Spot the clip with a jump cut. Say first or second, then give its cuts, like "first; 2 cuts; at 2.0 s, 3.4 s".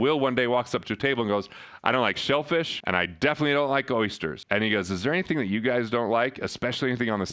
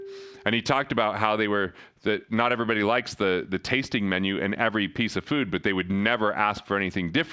first; 2 cuts; at 2.8 s, 4.4 s